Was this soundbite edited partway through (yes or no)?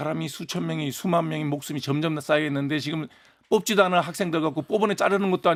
no